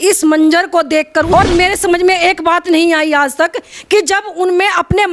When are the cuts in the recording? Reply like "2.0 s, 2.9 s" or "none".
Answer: 1.3 s